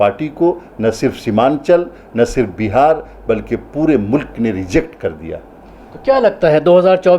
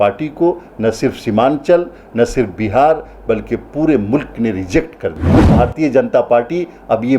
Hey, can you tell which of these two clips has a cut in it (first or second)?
second